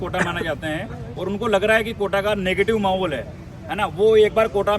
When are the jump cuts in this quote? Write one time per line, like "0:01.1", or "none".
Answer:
none